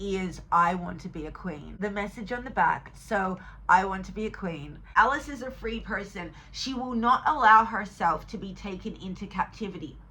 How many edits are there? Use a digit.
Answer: 2